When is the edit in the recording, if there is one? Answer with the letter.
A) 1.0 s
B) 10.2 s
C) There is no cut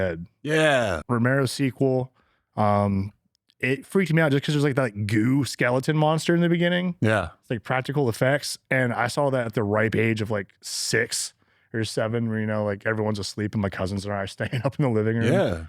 A